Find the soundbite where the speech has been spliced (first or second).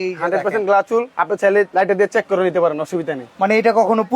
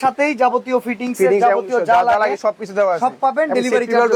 first